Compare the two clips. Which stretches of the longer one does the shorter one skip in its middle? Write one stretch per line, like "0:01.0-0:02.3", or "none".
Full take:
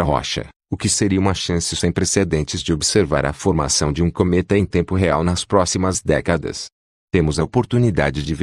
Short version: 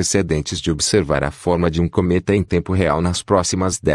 0:03.4-0:03.6